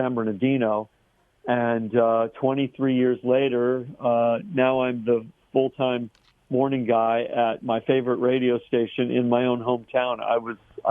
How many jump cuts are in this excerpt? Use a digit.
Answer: 0